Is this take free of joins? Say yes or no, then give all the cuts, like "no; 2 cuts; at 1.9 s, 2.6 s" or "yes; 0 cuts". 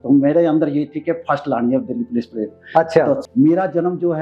no; 1 cut; at 3.2 s